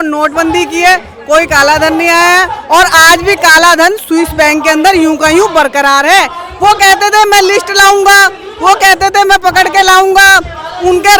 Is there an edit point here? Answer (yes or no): no